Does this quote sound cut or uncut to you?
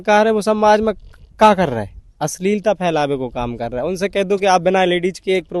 uncut